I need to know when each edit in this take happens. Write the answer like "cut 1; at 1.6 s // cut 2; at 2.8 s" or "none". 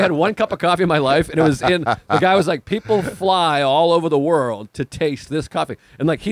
none